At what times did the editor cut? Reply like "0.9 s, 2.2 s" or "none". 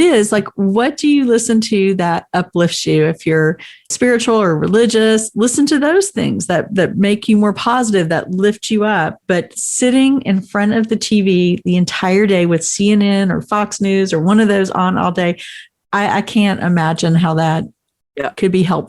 3.9 s